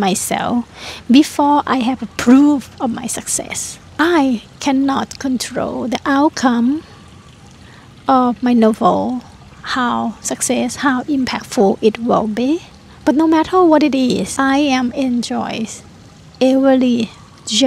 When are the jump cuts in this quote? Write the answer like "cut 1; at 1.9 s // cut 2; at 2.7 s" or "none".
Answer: none